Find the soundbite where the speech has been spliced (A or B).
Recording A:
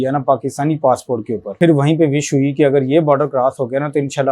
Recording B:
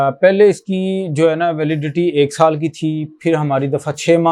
A